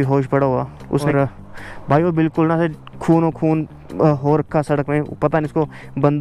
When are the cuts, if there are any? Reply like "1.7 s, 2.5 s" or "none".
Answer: 1.1 s

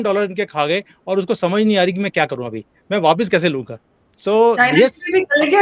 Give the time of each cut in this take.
none

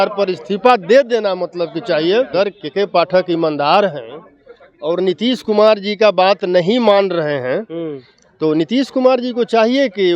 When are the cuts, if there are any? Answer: 2.3 s

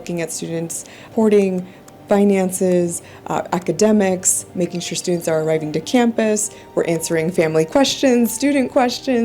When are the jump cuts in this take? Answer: 1.1 s

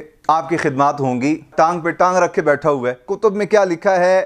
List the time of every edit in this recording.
1.5 s, 3.0 s

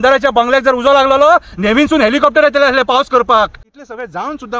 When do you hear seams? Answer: 3.6 s

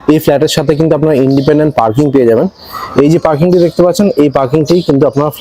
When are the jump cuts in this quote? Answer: none

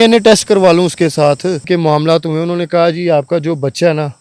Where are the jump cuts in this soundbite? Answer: 1.6 s

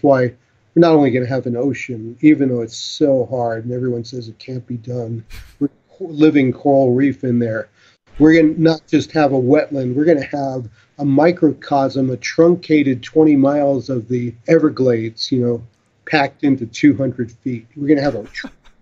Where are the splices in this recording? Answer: 5.9 s, 14.4 s

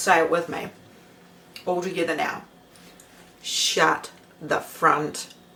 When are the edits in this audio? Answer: none

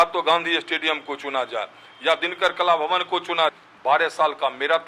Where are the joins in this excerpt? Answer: 3.5 s

